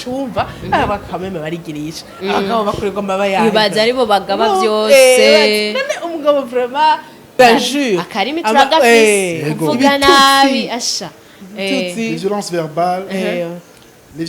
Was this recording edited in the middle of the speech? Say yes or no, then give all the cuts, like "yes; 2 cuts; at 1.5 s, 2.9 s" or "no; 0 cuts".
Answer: yes; 1 cut; at 7.3 s